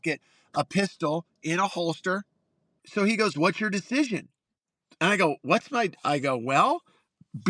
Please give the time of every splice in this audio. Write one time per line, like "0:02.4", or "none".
0:02.8